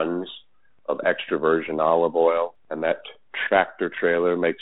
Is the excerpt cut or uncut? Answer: cut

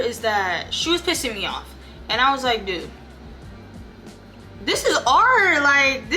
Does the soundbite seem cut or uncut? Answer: uncut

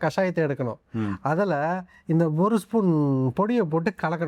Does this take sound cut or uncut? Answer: uncut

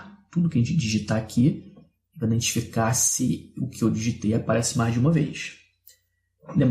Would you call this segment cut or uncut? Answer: uncut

